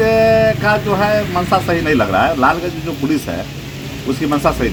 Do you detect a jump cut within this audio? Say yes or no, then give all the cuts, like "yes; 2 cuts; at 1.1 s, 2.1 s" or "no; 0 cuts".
no; 0 cuts